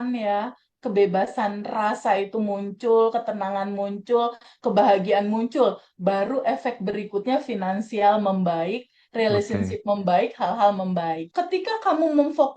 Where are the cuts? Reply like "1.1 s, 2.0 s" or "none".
11.3 s